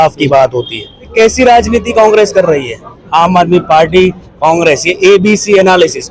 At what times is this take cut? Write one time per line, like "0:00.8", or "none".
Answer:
0:01.1

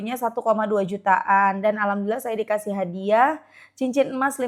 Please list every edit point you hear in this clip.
none

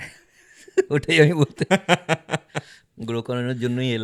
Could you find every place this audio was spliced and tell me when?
none

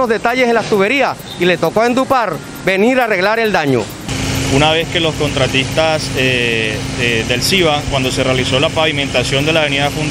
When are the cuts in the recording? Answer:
0:04.1

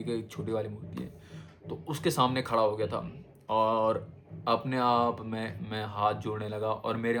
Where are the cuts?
none

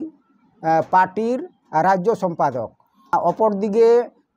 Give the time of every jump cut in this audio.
0:03.1

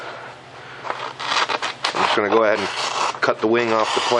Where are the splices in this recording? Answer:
0:02.4

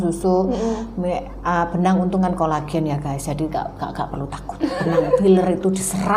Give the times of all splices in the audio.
none

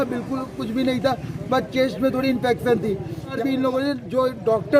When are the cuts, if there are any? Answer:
0:03.3

